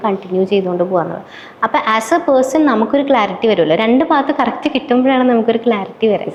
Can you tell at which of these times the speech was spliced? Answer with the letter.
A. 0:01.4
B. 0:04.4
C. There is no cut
C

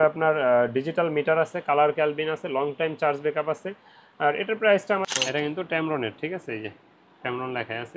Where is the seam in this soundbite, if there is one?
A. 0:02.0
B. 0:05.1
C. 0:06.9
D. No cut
B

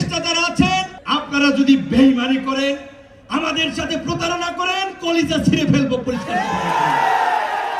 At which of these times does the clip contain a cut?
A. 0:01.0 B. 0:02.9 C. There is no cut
A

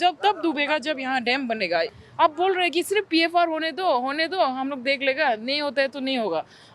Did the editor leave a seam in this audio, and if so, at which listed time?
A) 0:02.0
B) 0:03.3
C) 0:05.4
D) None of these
A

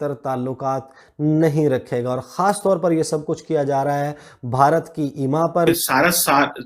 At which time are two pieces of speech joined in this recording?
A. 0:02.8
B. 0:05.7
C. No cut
B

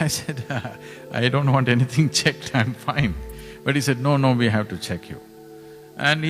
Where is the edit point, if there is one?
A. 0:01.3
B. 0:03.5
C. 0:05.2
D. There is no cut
D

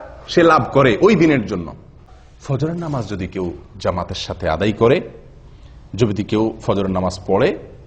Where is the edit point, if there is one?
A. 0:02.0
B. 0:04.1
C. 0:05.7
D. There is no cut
A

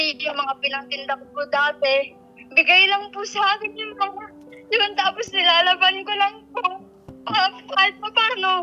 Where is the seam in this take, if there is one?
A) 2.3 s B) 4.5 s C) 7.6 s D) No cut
D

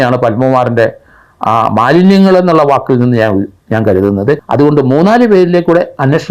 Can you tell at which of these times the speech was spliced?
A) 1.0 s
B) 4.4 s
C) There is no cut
B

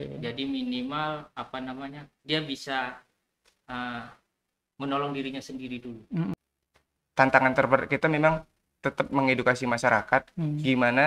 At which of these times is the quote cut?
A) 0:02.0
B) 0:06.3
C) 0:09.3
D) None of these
B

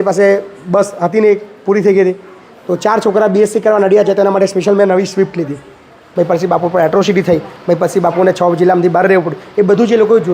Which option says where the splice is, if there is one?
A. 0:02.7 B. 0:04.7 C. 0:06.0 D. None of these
C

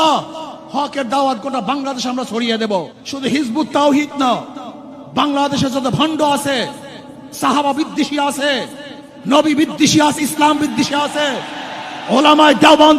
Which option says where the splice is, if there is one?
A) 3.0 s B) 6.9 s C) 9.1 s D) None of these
A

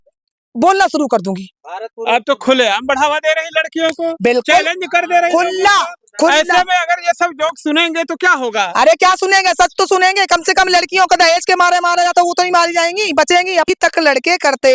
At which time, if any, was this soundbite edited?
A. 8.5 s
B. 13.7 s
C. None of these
B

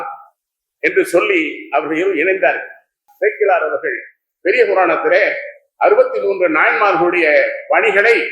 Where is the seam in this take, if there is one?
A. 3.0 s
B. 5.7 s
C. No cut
A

